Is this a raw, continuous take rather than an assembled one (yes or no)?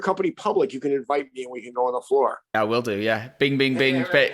yes